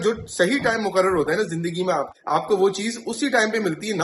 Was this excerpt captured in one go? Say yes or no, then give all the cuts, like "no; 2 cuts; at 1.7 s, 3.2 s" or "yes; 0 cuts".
yes; 0 cuts